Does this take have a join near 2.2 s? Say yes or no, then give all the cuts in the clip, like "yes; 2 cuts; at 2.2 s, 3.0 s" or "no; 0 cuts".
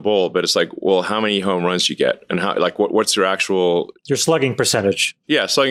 no; 0 cuts